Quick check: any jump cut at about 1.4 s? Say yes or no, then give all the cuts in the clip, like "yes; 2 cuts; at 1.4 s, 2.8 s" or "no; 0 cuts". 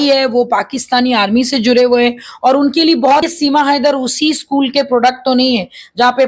no; 1 cut; at 3.2 s